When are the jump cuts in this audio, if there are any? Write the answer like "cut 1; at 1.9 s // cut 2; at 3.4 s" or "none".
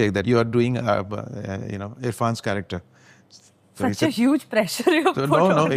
none